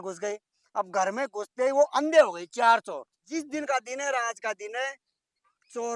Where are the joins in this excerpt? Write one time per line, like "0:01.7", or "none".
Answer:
0:03.2